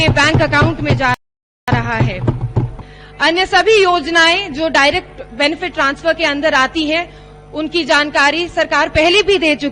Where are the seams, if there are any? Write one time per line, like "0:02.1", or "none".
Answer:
none